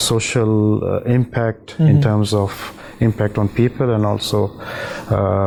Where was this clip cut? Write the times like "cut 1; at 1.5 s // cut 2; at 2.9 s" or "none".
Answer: none

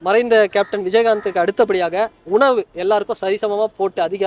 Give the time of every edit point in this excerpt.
none

